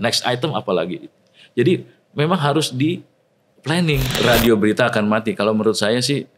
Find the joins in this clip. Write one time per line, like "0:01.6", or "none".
0:04.1